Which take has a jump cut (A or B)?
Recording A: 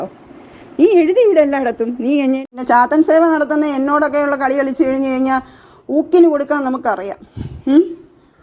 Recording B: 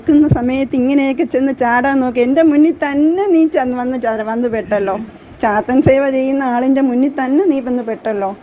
A